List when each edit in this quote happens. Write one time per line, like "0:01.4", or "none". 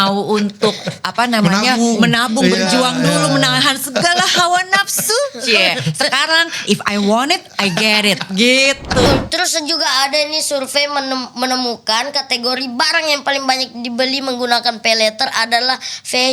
0:09.1